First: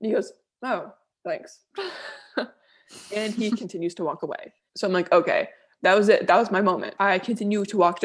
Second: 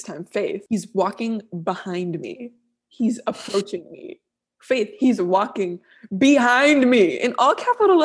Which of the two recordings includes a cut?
first; 2 cuts; at 4.4 s, 6.9 s

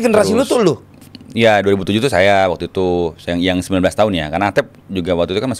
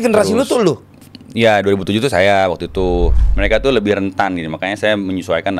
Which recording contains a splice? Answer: second; 1 cut; at 3.2 s

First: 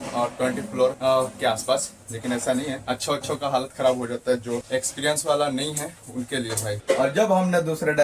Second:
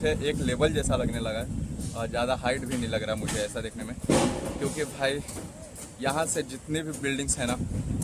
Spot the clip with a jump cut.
first; 4 cuts; at 1.0 s, 2.8 s, 4.6 s, 6.8 s

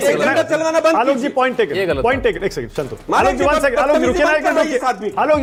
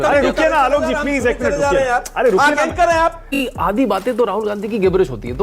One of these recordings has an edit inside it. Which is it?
second; 1 cut; at 3.2 s

